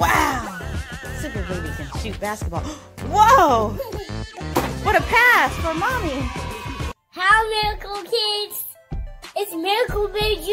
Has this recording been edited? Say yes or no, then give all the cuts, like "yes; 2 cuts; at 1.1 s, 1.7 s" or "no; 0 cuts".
yes; 1 cut; at 7.0 s